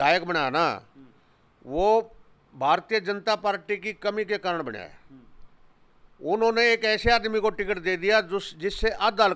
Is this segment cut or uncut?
uncut